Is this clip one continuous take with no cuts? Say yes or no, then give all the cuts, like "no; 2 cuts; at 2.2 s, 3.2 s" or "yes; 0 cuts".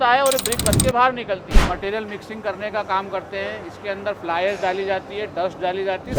no; 1 cut; at 1.6 s